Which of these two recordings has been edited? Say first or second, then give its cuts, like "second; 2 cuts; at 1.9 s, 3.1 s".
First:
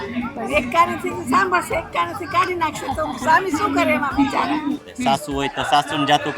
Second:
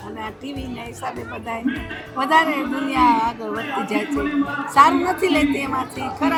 first; 1 cut; at 4.8 s